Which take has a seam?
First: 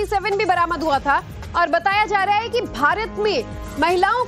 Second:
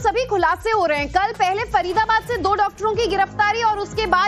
second; 1 cut; at 2.3 s

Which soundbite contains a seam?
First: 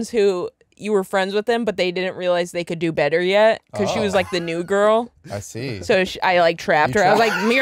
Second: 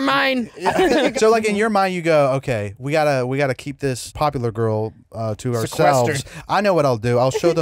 second; 2 cuts; at 1.1 s, 4.1 s

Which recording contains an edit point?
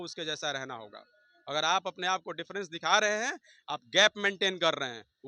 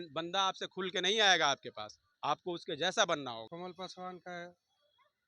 second; 1 cut; at 3.5 s

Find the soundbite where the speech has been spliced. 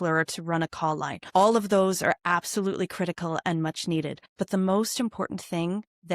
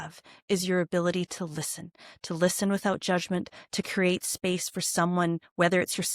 first; 2 cuts; at 1.1 s, 4.2 s

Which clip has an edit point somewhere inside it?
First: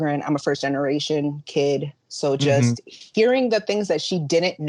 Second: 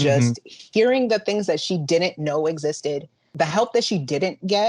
second; 1 cut; at 3.2 s

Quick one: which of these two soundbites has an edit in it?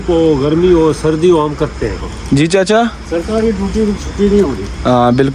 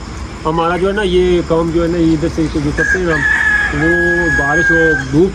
first; 1 cut; at 2.1 s

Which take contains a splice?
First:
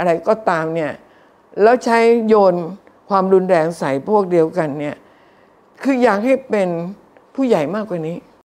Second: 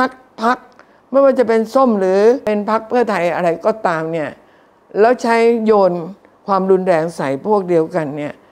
second; 1 cut; at 2.4 s

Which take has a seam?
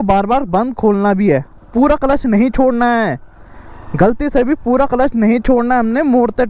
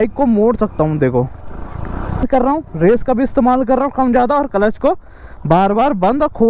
second; 1 cut; at 2.2 s

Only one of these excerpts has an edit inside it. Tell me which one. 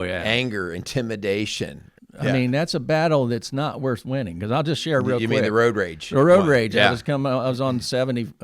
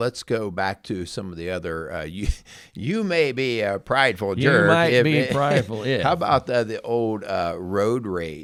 first; 1 cut; at 1.9 s

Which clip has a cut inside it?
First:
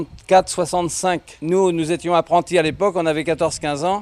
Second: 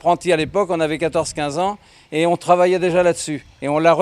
first; 1 cut; at 1.3 s

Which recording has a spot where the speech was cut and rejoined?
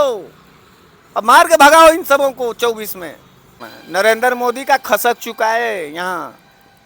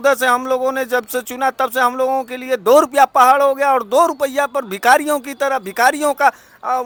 first; 1 cut; at 3.7 s

